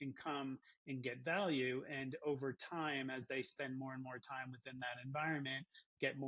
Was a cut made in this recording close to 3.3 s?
no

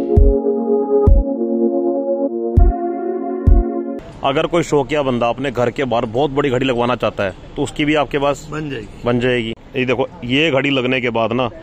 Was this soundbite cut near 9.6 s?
yes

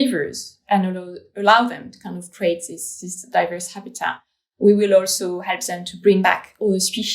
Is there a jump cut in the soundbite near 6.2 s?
yes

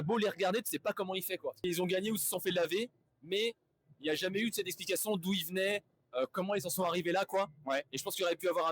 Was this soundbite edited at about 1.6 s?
yes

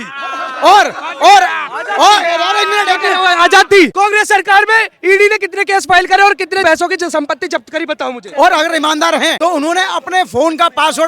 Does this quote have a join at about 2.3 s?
no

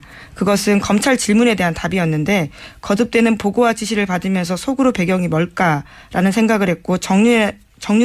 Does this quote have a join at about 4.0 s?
no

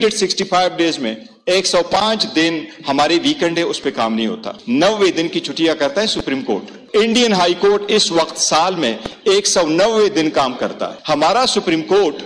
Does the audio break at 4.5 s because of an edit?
yes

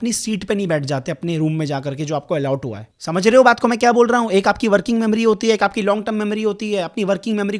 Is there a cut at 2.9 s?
yes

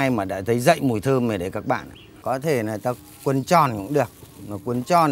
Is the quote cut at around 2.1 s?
yes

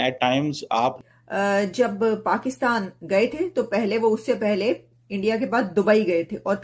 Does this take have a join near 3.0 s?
no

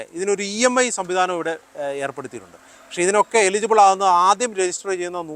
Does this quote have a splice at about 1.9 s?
no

